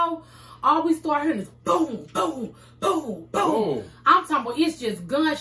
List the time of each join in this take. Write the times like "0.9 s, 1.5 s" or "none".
none